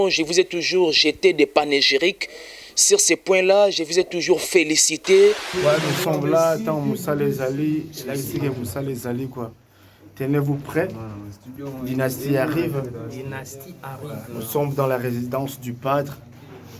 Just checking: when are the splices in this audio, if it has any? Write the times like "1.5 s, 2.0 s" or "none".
5.5 s